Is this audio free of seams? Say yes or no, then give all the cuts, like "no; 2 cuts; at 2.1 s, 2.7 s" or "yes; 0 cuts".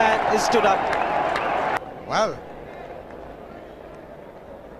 no; 1 cut; at 1.8 s